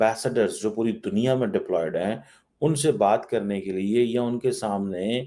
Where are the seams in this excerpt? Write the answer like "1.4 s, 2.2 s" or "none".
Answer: none

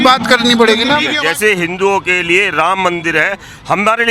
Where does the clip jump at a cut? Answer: 1.1 s

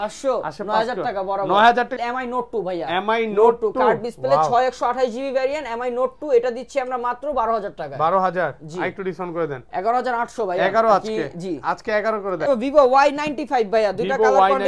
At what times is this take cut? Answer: 2.0 s, 12.5 s

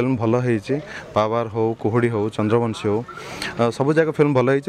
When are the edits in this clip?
none

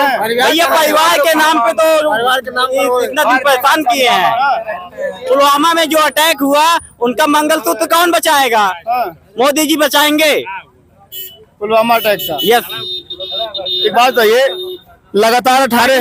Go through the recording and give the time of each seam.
none

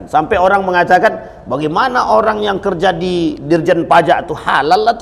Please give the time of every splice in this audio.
none

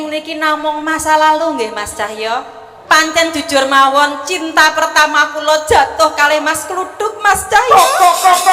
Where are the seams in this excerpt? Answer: 2.7 s

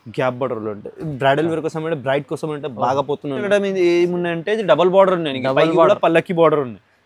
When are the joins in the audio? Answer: 3.4 s

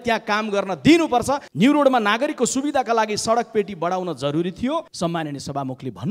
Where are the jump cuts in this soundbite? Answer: 1.5 s, 4.9 s

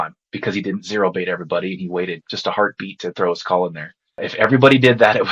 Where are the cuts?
2.3 s, 4.2 s

